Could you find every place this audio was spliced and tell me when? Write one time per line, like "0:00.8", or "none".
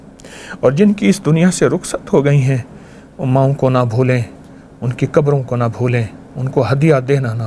none